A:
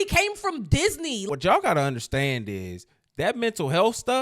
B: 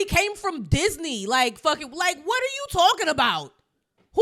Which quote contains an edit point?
A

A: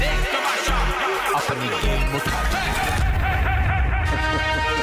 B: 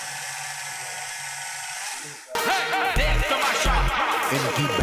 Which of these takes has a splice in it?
B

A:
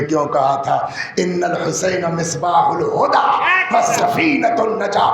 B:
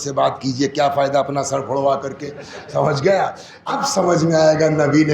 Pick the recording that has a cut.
B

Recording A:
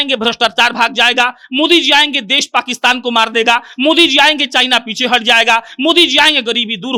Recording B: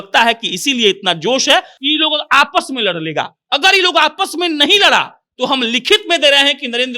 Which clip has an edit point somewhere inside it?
B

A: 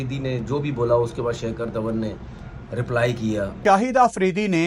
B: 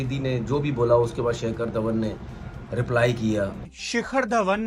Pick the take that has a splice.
B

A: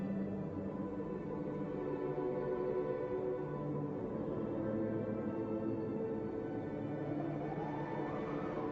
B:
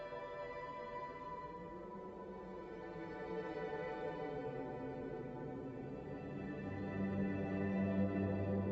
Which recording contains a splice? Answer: B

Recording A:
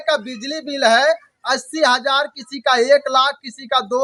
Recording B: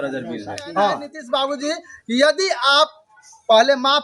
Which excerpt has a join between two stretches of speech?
B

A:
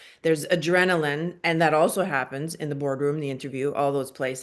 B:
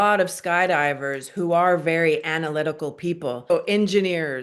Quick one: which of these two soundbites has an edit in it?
B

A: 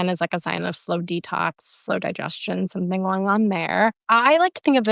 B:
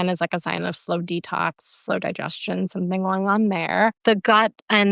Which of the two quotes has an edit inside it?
B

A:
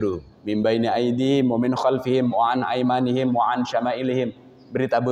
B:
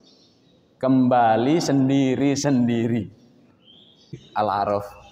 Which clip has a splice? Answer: B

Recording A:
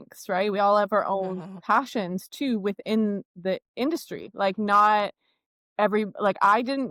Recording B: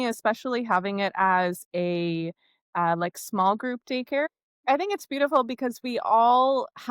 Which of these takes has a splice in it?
B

